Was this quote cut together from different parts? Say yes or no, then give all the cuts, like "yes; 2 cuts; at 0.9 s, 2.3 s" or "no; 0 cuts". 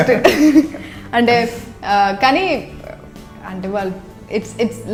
no; 0 cuts